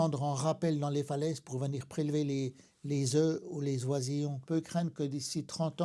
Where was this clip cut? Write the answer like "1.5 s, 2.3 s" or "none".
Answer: 4.4 s